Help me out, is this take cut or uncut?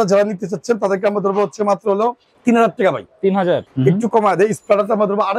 cut